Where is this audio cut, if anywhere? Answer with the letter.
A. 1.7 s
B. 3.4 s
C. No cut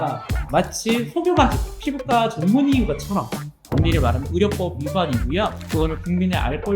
A